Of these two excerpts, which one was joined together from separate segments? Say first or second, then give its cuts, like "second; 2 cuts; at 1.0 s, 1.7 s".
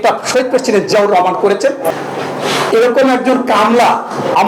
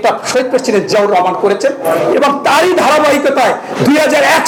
first; 1 cut; at 1.9 s